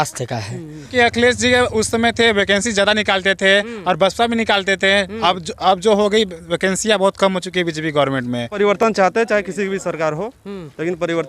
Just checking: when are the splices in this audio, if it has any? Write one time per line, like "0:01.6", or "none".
0:00.9
0:08.8